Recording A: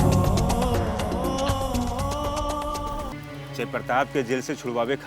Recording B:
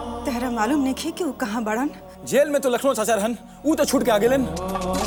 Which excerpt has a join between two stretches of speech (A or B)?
A